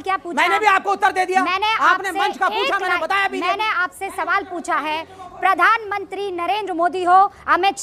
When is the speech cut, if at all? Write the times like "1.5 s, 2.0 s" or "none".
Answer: none